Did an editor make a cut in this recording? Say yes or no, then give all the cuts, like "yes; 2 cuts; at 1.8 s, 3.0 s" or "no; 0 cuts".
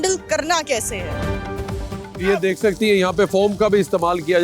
no; 0 cuts